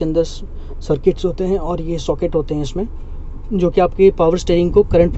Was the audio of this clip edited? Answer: no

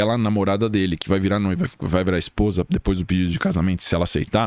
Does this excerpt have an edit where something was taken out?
no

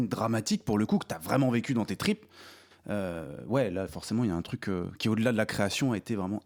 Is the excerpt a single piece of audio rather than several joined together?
yes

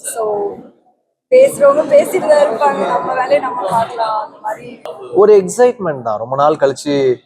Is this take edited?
yes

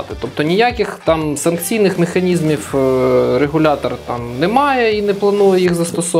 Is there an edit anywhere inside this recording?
no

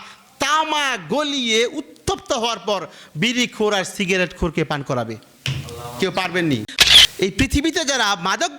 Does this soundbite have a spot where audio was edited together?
yes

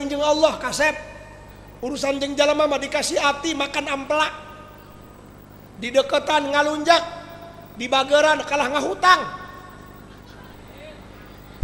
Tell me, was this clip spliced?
no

